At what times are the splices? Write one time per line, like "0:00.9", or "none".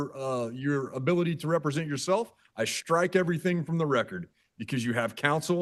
none